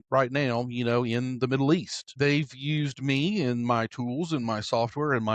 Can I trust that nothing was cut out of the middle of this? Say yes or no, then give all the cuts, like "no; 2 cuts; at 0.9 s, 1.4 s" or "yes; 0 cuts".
no; 1 cut; at 2.0 s